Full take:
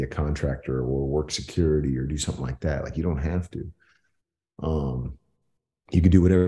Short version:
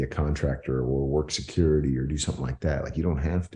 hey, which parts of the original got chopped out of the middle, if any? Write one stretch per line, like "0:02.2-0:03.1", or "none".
none